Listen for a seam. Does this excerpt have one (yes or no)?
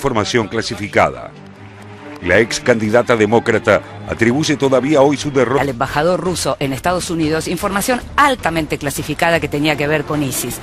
no